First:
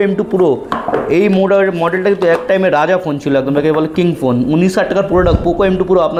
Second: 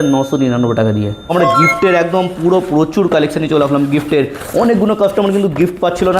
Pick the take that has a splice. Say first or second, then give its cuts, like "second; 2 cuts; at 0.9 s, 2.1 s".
second; 1 cut; at 1.3 s